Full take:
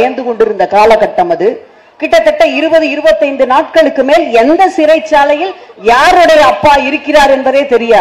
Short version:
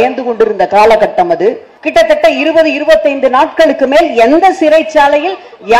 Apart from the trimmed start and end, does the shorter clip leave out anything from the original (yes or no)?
yes